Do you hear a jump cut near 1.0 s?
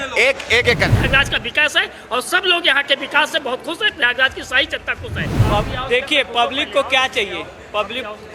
yes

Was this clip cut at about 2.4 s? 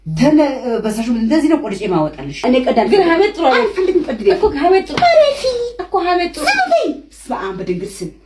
yes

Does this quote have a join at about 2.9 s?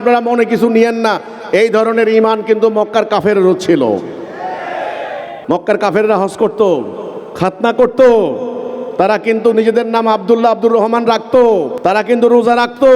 no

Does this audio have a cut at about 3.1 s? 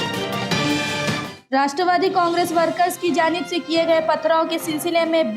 no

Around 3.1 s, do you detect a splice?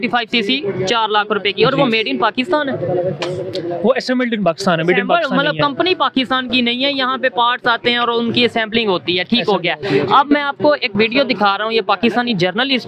no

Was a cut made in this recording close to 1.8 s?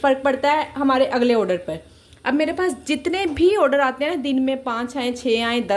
no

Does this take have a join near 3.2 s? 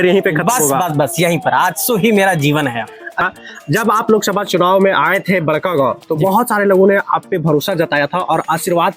yes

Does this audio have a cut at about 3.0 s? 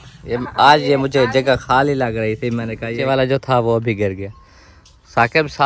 yes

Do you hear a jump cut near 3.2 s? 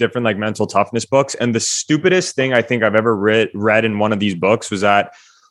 no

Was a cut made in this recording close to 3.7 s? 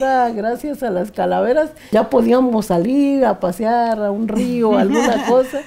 no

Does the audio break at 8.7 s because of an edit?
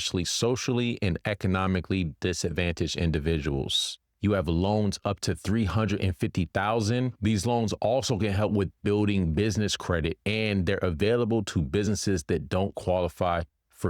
no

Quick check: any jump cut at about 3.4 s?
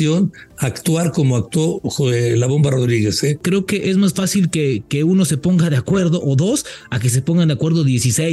yes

